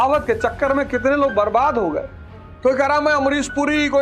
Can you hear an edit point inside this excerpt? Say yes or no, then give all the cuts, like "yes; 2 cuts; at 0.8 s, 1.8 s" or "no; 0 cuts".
yes; 1 cut; at 2.3 s